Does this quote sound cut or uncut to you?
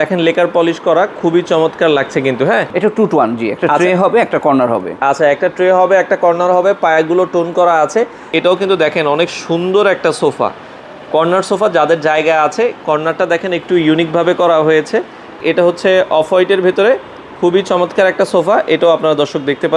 cut